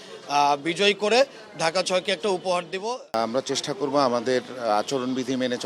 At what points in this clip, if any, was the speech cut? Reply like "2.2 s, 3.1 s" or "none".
3.1 s

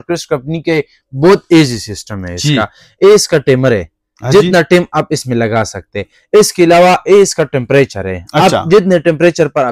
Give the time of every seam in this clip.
none

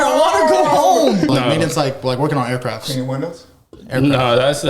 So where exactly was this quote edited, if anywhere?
1.3 s

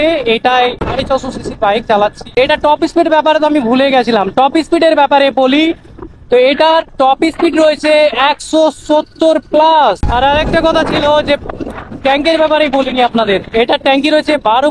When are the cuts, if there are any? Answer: 0.8 s, 2.4 s, 10.0 s

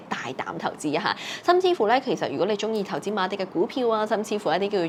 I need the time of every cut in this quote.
none

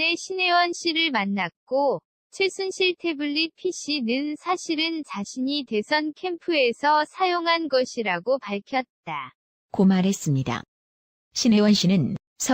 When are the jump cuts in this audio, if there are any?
5.6 s

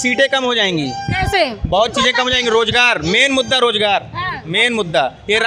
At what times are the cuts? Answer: none

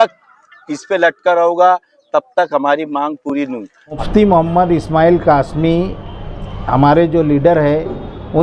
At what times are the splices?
4.0 s

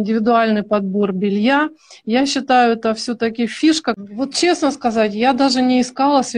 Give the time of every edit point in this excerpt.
4.0 s

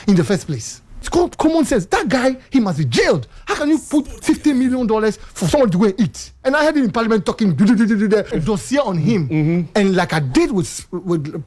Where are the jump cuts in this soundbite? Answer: 1.1 s, 6.3 s, 8.3 s

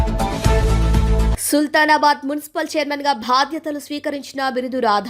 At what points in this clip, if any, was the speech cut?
1.3 s

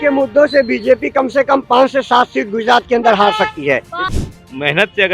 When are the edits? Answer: 4.1 s

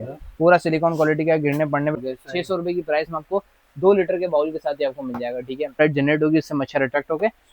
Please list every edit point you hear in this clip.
1.9 s, 5.8 s

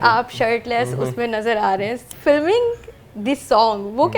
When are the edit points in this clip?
2.0 s

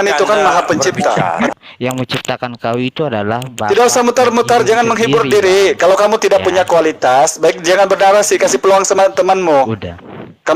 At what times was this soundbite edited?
1.5 s

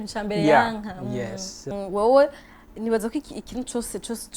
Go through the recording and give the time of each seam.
1.7 s

